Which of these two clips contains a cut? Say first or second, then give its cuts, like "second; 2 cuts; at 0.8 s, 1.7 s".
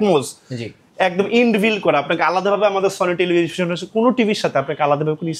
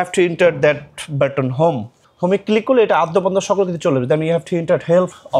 second; 1 cut; at 2.0 s